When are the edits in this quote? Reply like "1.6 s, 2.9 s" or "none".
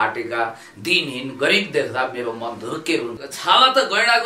3.2 s